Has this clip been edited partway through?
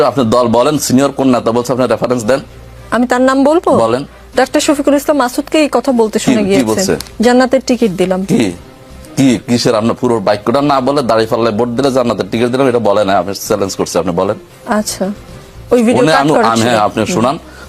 no; 0 cuts

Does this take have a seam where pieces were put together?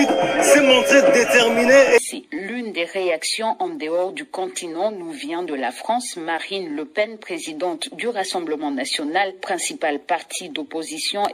yes; 1 cut; at 2.0 s

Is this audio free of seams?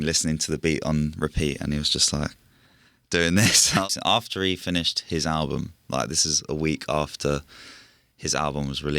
no; 1 cut; at 3.9 s

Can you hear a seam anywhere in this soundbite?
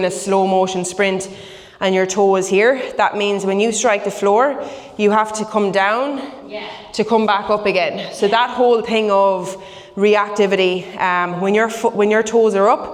no; 0 cuts

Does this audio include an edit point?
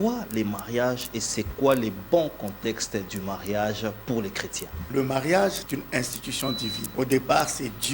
yes; 3 cuts; at 4.9 s, 5.6 s, 6.9 s

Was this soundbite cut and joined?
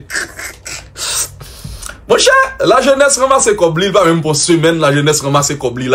yes; 1 cut; at 1.0 s

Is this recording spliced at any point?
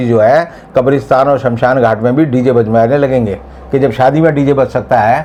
no; 0 cuts

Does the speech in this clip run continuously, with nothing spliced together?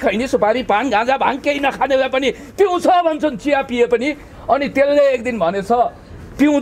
yes; 0 cuts

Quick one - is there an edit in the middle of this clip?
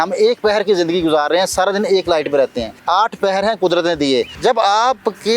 yes; 2 cuts; at 2.7 s, 4.3 s

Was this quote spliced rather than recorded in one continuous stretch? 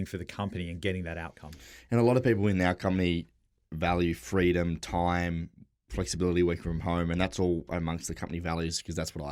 no; 0 cuts

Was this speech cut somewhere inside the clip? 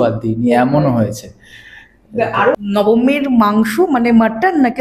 yes; 1 cut; at 2.6 s

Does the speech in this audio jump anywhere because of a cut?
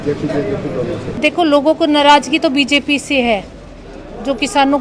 yes; 1 cut; at 1.2 s

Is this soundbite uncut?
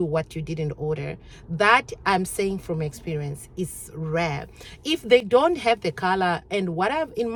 yes; 0 cuts

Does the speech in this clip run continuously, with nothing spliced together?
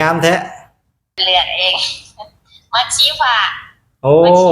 no; 1 cut; at 1.2 s

